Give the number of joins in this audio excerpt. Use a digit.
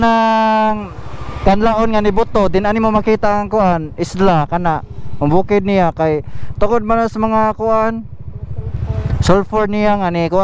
0